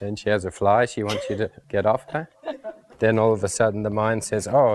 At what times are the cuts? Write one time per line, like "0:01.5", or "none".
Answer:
0:01.6
0:02.8